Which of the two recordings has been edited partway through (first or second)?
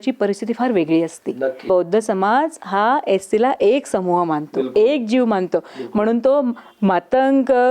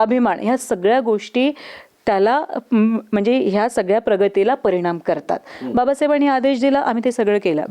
first